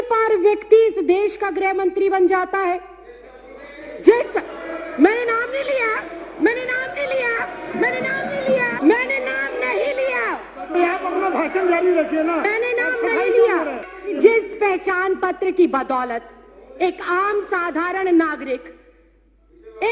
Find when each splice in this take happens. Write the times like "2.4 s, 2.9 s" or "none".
8.7 s, 14.2 s